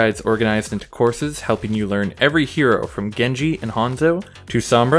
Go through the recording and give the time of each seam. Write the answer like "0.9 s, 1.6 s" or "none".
none